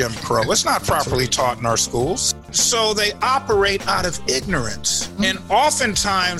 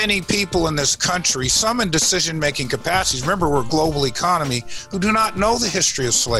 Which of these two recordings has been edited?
first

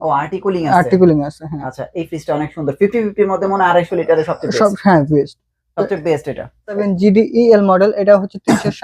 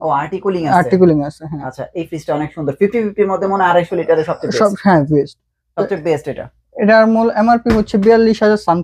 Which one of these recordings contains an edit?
first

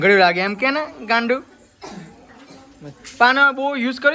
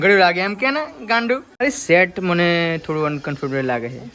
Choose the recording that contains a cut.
second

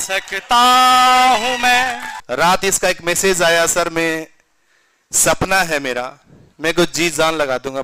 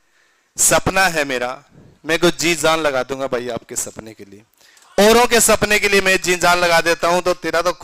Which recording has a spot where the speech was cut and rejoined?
first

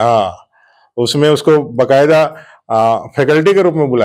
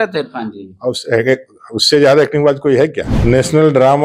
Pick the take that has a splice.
second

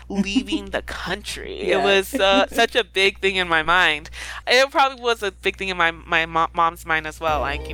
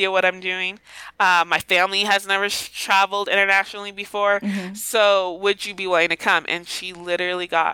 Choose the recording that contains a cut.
first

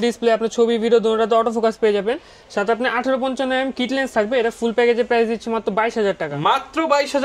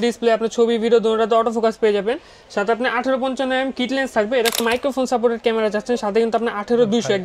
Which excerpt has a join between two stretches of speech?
second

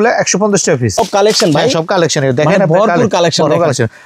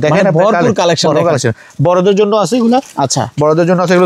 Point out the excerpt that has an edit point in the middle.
first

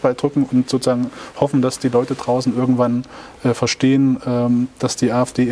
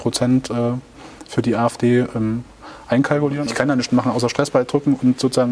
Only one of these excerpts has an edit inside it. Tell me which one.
second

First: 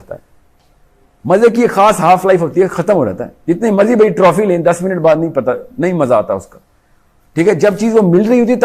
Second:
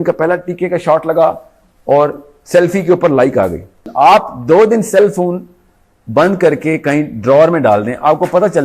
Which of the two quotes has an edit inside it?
second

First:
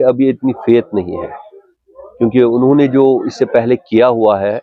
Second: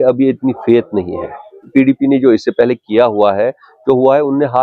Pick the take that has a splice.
second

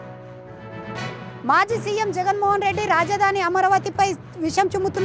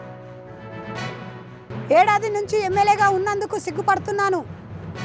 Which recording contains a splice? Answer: first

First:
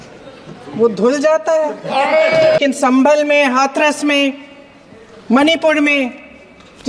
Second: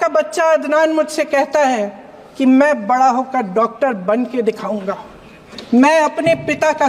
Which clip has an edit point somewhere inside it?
first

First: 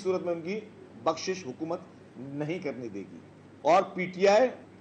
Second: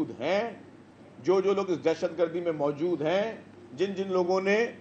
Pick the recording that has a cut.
first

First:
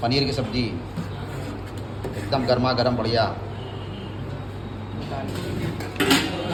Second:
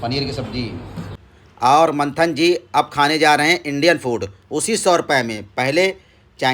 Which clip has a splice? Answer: second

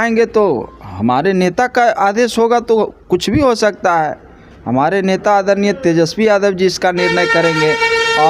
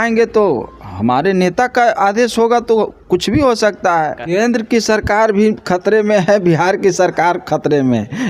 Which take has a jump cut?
second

